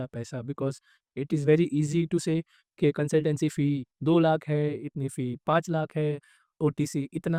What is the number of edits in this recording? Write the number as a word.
zero